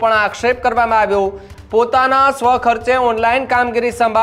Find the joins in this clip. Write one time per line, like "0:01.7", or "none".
0:01.5

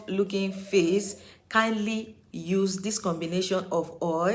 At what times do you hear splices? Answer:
none

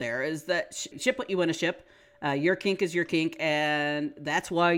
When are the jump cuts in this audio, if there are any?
0:00.9

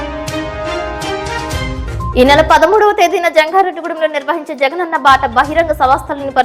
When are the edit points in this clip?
0:02.1

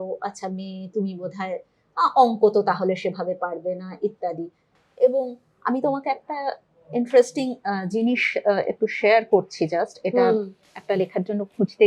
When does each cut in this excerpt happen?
none

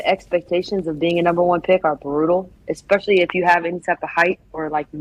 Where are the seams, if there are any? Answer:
none

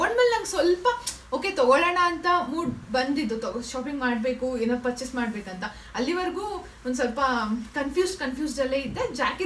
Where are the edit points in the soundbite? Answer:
none

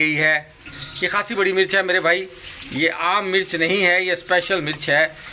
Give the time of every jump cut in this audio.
none

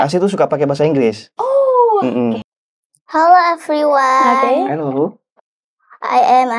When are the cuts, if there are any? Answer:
0:02.4

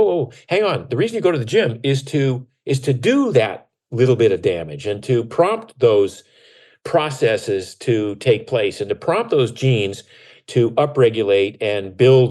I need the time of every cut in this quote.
none

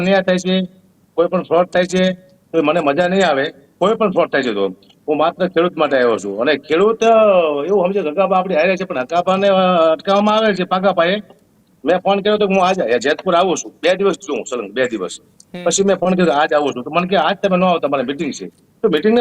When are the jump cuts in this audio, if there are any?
none

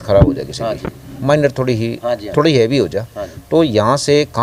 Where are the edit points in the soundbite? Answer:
none

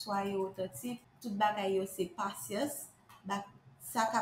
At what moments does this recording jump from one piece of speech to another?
0:01.1

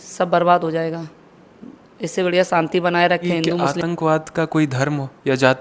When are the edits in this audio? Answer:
0:03.6

